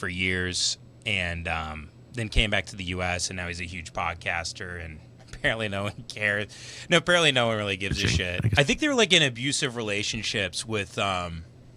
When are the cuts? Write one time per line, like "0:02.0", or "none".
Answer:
0:08.5